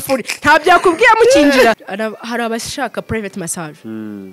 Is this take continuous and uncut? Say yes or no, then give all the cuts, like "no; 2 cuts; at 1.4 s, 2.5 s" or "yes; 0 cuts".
no; 1 cut; at 1.8 s